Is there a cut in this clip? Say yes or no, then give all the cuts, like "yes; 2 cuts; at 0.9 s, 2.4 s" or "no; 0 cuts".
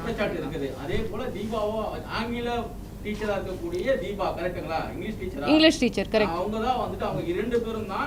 no; 0 cuts